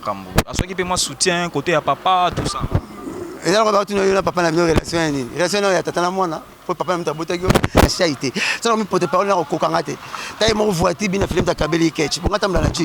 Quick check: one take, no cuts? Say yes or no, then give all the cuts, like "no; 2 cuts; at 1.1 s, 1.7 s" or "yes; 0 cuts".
no; 1 cut; at 7.9 s